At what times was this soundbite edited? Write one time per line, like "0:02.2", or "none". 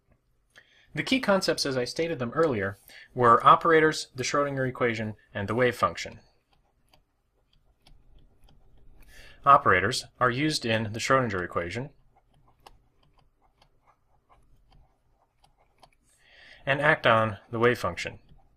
0:11.0

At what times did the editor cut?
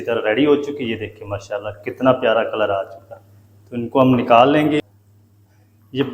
0:04.8

